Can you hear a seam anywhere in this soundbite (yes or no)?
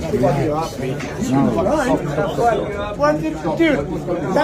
no